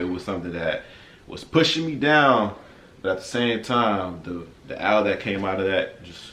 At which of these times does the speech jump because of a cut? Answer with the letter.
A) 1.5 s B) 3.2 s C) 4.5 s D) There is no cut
D